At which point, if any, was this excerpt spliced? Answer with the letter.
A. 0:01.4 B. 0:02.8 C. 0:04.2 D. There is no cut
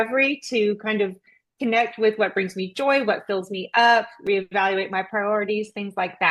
D